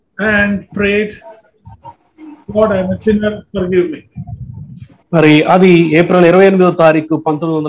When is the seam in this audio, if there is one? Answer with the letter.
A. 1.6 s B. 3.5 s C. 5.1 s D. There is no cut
D